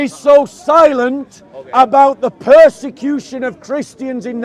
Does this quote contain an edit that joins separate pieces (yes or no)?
no